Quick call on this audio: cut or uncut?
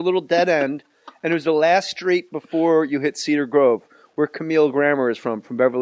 cut